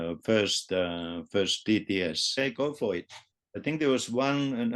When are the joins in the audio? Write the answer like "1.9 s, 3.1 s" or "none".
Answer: 2.4 s